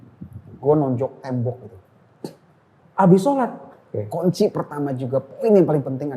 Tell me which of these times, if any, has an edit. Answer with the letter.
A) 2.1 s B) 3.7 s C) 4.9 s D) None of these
B